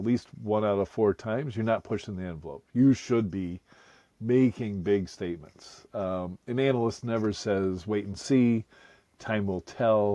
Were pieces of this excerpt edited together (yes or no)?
no